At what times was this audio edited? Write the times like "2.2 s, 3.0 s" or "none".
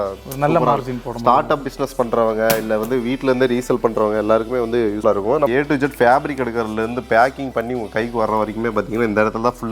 5.1 s